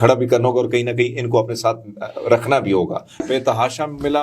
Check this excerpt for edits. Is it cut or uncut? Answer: cut